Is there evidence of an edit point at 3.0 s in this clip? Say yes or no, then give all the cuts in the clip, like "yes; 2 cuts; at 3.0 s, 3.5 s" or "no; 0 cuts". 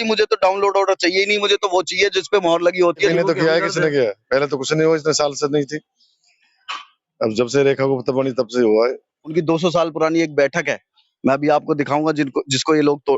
yes; 2 cuts; at 3.0 s, 9.3 s